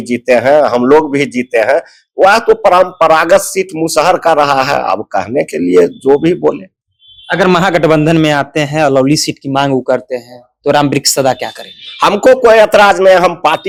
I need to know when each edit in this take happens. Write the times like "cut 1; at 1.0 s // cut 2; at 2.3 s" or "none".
none